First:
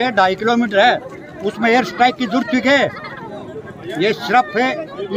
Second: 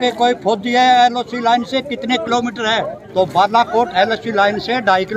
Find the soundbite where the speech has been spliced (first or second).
second